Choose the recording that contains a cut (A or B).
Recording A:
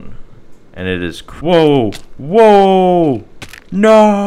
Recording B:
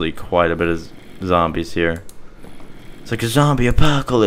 A